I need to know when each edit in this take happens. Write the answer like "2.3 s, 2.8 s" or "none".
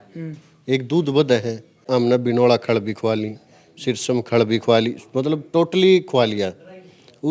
1.8 s

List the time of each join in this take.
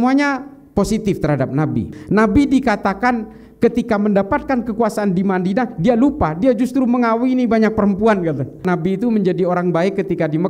1.9 s, 8.6 s

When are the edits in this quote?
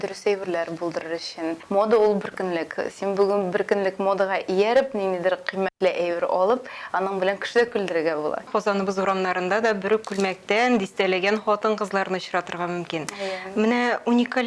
1.6 s, 8.5 s

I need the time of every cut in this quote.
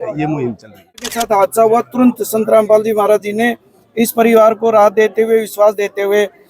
1.1 s

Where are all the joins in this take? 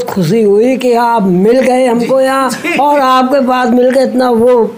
none

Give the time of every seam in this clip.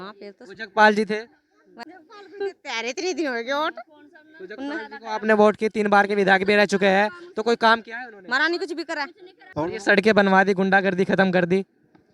9.4 s

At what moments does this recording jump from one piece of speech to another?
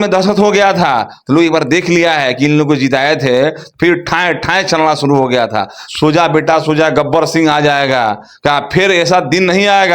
5.8 s

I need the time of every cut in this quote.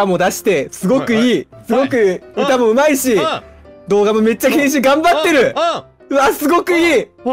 none

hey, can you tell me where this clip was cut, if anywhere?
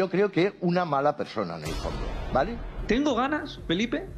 2.7 s

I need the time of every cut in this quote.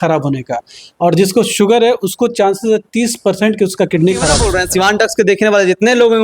4.4 s

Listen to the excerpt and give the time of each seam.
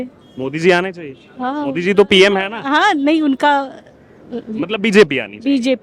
none

